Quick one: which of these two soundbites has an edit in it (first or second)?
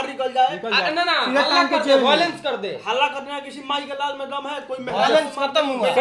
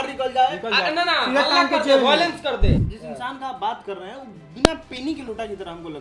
second